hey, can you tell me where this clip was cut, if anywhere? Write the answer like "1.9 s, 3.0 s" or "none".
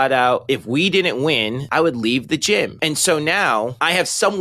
1.6 s, 2.8 s